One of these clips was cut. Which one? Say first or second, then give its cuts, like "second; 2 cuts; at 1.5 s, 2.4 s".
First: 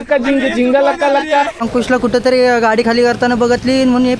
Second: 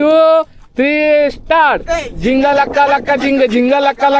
first; 1 cut; at 1.6 s